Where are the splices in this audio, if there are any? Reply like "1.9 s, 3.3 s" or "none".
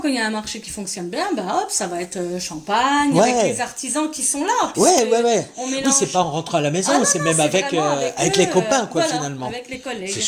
none